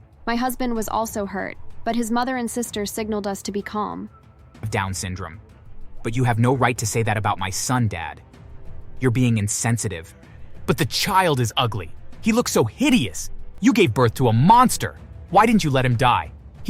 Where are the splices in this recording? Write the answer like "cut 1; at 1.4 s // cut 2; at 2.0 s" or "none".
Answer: cut 1; at 4.5 s